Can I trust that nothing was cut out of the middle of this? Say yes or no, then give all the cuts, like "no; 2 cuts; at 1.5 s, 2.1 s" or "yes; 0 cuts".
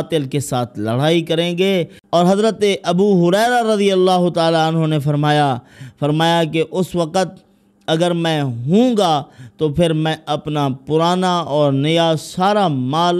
no; 1 cut; at 2.0 s